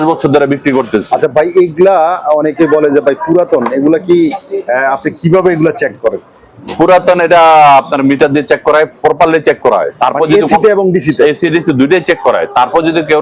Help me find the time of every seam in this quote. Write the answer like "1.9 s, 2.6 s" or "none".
none

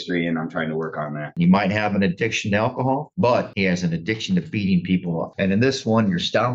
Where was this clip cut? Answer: 1.3 s, 5.3 s

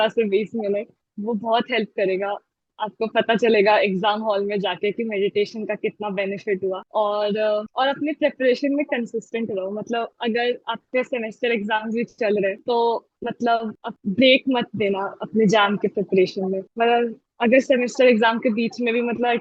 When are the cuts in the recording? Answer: none

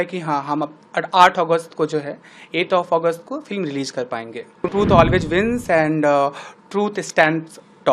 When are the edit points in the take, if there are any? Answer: 4.7 s

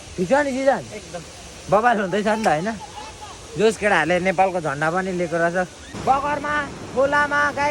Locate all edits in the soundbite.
5.8 s

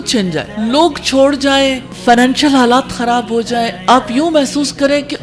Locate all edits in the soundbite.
1.9 s

